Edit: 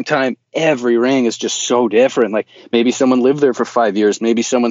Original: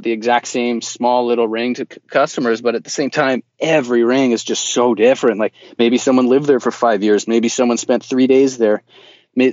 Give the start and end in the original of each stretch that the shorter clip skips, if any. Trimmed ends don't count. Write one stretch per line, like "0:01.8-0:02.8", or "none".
none

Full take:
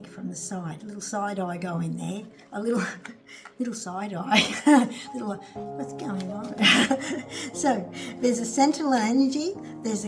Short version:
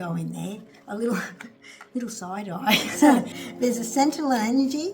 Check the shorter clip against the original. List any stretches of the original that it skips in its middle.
0:05.0-0:08.0

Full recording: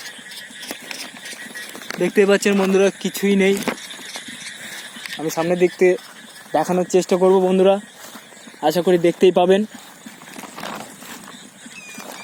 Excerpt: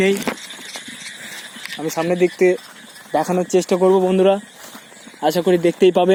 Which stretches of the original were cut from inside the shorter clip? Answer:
none

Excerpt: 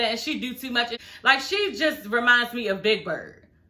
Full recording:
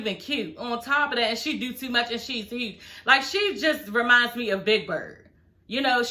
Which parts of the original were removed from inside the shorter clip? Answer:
0:02.2-0:02.8

